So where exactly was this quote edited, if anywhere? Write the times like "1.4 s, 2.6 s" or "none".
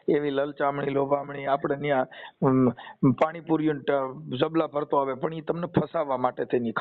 none

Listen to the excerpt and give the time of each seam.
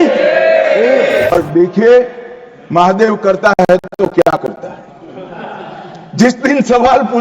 1.3 s

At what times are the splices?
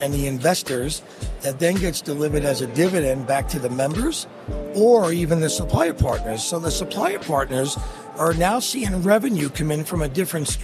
none

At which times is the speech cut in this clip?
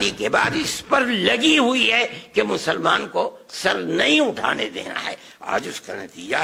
none

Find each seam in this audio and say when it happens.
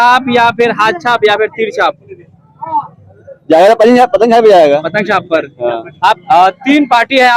6.2 s

